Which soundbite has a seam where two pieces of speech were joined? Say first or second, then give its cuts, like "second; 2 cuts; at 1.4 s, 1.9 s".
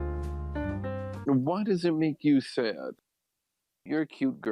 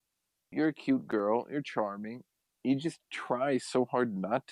first; 1 cut; at 1.2 s